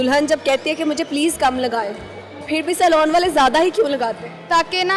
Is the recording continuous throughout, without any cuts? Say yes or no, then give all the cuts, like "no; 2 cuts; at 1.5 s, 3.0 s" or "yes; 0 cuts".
yes; 0 cuts